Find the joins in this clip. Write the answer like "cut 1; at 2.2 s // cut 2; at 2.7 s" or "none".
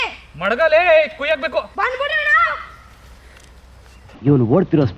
cut 1; at 1.7 s